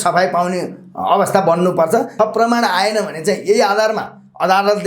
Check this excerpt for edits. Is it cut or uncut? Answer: cut